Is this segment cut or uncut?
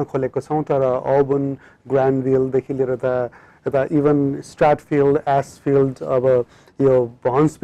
uncut